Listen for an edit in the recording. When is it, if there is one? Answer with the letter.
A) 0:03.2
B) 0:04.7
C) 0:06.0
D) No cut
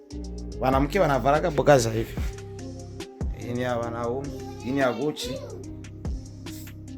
C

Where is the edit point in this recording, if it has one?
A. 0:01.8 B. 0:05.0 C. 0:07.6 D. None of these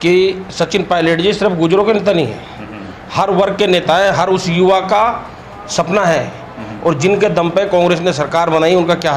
D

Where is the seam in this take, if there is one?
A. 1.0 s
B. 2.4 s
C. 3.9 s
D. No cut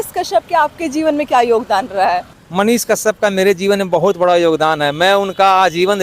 B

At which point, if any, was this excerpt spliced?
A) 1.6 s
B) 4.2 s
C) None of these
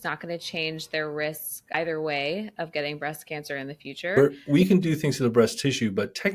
B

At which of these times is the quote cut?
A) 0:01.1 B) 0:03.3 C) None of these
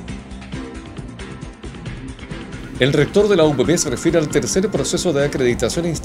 A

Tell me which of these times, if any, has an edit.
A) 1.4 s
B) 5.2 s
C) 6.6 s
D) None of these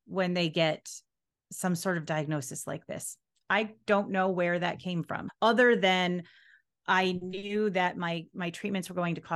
B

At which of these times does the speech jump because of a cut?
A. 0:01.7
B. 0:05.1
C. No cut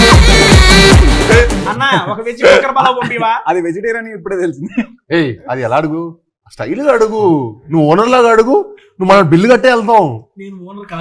A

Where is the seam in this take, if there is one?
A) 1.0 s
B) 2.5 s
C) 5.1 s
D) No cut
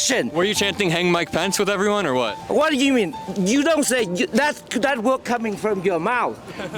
D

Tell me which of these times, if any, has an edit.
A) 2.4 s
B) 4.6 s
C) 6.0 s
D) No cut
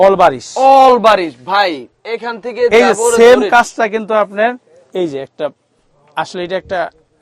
D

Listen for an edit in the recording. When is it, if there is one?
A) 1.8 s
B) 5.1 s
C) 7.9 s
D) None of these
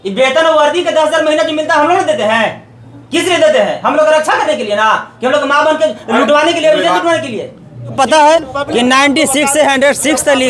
C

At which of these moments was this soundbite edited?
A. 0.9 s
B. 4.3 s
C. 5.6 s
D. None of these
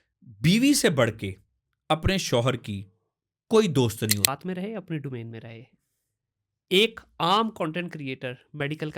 B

